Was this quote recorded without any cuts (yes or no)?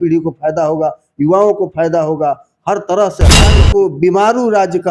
no